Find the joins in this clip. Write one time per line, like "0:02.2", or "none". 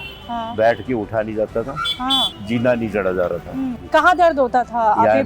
0:02.3
0:03.8